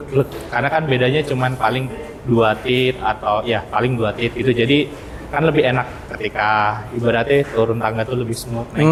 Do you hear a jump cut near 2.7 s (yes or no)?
no